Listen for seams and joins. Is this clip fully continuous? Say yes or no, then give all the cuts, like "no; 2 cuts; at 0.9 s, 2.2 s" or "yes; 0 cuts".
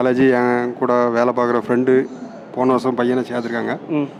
yes; 0 cuts